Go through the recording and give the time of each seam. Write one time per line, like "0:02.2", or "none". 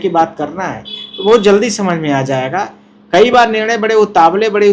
none